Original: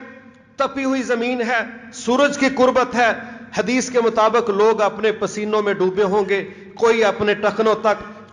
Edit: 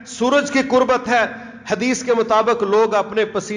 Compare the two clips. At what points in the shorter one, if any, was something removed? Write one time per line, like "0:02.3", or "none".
none

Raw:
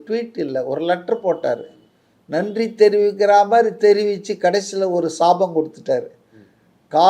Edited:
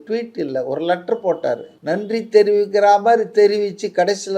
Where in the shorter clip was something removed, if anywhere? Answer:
0:01.7

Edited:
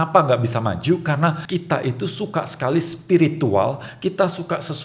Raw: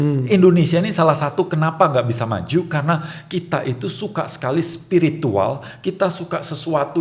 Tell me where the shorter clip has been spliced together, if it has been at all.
0:01.4

